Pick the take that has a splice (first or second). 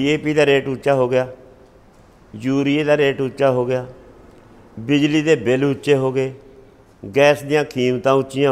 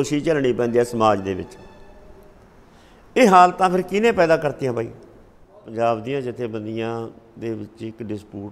second